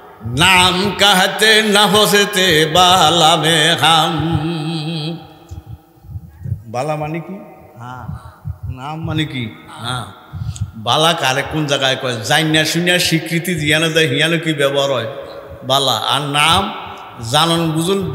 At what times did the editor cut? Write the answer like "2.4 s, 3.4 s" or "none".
none